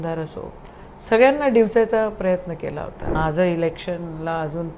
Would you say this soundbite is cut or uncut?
cut